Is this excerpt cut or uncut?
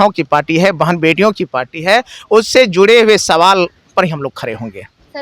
uncut